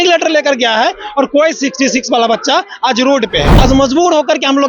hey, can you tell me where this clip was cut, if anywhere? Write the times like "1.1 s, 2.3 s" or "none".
3.5 s